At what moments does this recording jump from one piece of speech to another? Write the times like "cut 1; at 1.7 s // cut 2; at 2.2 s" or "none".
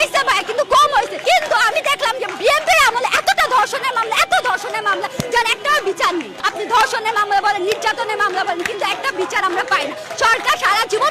cut 1; at 1.1 s // cut 2; at 6.4 s